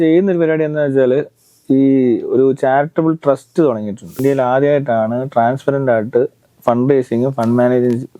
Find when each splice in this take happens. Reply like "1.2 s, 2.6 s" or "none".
4.2 s